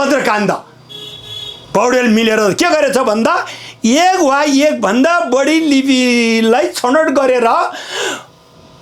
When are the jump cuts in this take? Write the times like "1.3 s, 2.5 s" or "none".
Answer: none